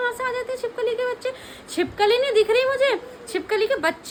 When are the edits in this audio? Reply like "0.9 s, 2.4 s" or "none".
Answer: none